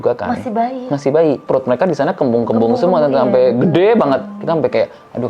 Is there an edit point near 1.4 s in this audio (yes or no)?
yes